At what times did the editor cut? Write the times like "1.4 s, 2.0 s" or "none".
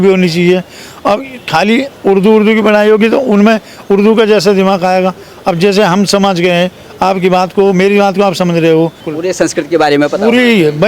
none